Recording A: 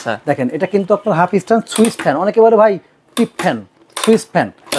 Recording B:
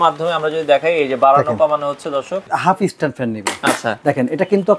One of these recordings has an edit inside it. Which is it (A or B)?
B